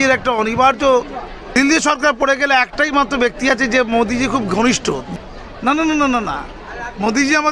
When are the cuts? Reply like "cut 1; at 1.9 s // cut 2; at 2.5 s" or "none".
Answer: cut 1; at 1.4 s // cut 2; at 5.1 s